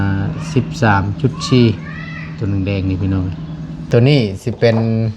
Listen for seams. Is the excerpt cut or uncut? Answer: cut